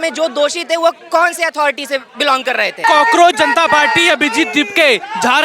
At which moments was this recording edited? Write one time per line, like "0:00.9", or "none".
0:02.8